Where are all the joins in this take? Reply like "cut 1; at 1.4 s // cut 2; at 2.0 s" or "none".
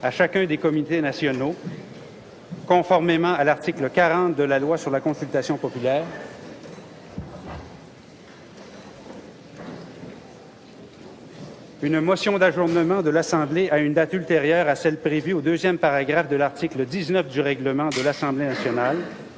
cut 1; at 12.8 s